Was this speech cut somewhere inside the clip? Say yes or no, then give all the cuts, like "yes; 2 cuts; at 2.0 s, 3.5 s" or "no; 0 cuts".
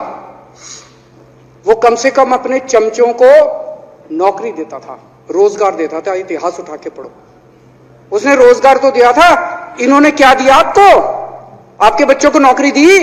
no; 0 cuts